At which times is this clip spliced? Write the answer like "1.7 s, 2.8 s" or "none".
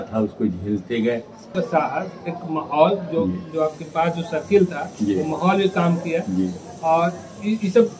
1.5 s